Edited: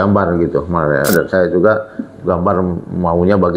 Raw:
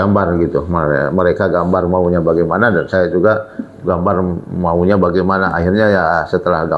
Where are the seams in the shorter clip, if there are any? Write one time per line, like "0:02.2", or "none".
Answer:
0:01.1

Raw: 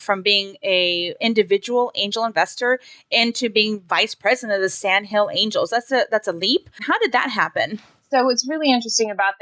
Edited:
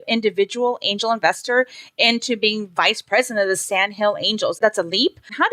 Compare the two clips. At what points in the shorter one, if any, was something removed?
0:04.6

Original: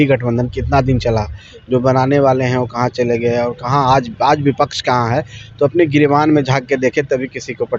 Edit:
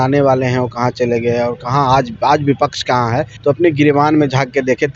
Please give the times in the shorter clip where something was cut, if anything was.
0:03.3

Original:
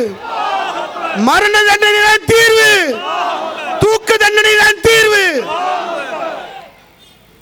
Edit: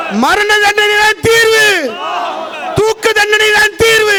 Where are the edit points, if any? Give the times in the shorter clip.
none

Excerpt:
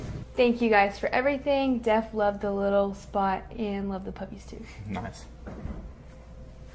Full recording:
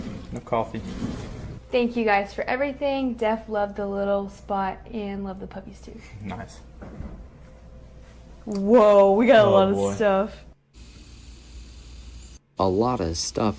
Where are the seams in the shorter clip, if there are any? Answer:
none

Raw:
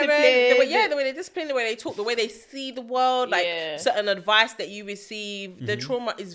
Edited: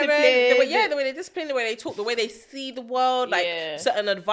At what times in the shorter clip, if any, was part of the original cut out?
none

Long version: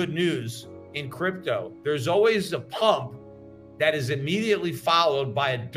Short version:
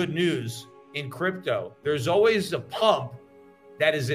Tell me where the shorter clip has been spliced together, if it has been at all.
none

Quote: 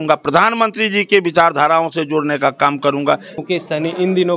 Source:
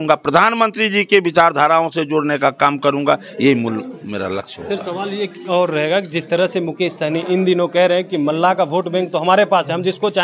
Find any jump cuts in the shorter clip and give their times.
0:03.4

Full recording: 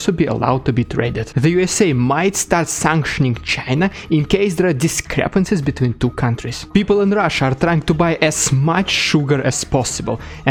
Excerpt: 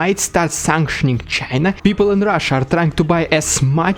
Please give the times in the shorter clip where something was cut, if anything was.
0:01.8

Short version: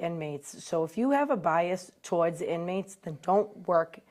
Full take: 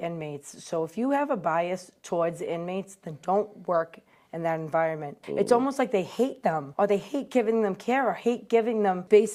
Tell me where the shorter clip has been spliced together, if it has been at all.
none

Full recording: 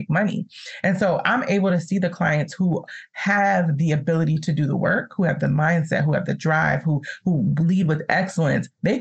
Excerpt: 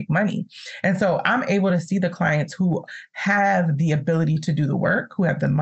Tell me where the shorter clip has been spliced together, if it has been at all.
none

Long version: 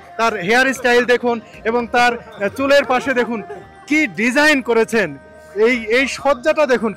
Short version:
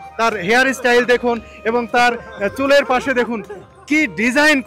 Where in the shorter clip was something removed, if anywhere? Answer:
none

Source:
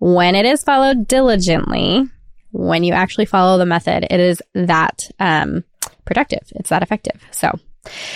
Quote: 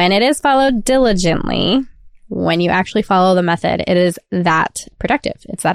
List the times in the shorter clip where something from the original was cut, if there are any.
0:04.8

